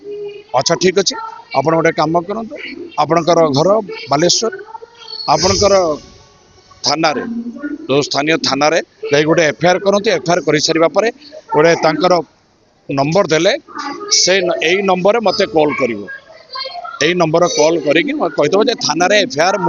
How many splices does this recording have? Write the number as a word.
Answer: zero